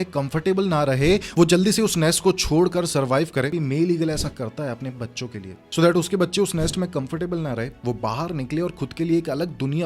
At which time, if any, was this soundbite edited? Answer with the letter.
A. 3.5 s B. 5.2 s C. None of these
A